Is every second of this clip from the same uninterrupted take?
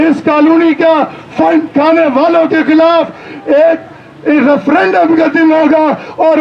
yes; 0 cuts

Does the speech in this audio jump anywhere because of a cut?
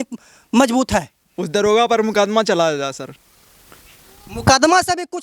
yes; 1 cut; at 1.7 s

